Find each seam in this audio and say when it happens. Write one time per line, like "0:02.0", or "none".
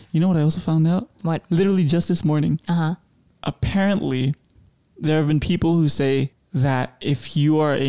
none